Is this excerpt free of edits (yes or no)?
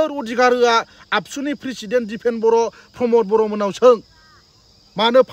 yes